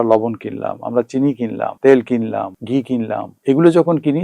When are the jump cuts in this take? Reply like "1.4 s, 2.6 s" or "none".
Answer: 1.7 s, 2.9 s